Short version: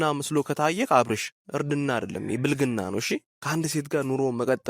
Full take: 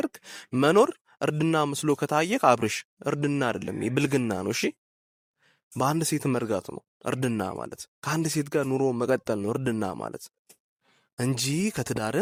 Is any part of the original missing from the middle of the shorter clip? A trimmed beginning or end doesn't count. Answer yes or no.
yes